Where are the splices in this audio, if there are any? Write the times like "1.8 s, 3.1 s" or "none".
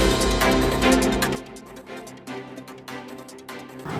1.2 s